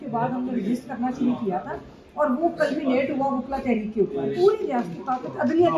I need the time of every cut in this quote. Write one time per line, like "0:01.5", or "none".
0:04.4